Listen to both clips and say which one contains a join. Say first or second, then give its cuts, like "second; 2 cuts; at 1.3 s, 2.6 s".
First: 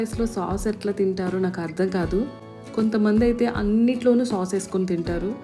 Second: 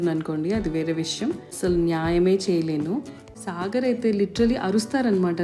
second; 2 cuts; at 1.5 s, 3.2 s